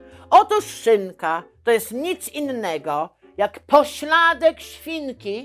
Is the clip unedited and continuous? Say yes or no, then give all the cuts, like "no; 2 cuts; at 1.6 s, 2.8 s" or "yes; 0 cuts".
yes; 0 cuts